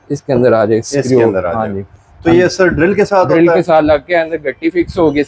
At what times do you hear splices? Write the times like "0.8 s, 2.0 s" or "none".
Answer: none